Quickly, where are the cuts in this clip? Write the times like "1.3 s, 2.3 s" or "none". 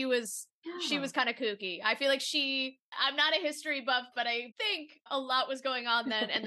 2.9 s, 4.5 s